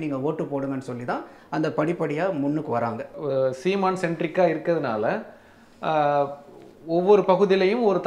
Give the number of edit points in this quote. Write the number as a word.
one